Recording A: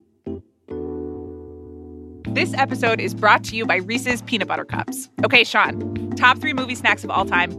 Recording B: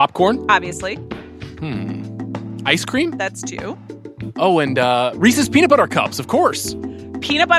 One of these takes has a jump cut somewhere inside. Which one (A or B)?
A